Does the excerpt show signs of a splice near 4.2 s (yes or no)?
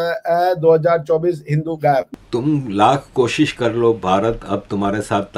no